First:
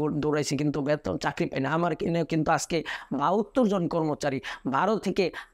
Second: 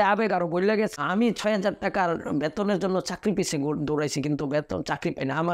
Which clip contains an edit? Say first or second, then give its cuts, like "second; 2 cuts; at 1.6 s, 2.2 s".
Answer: second; 1 cut; at 0.9 s